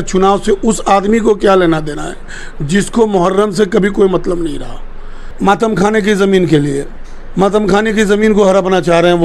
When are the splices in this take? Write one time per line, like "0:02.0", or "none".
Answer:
0:05.3